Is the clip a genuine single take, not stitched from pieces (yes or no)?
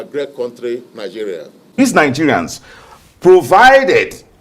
no